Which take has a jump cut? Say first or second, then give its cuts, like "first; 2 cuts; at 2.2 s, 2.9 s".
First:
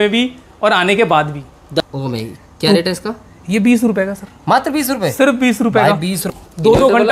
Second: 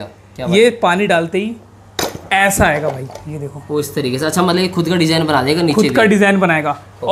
first; 2 cuts; at 1.8 s, 6.2 s